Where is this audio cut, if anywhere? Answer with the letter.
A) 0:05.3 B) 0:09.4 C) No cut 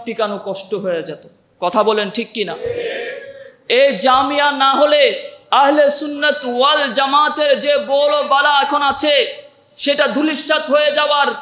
A